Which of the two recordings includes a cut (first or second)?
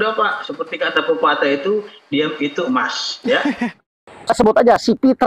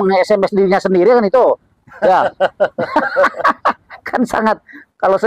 first